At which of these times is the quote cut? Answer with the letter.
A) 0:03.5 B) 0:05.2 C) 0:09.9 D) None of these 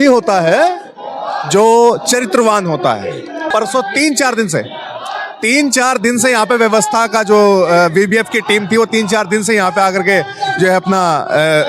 A